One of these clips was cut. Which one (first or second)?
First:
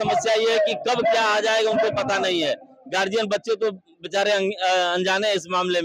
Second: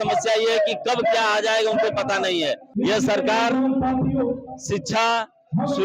second